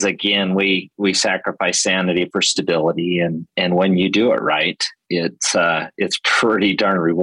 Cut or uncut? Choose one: uncut